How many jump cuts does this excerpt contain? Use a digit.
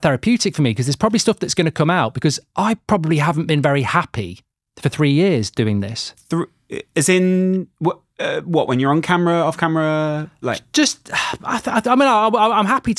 0